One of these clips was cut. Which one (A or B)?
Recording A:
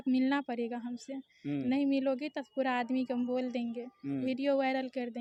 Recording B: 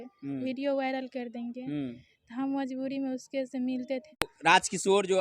B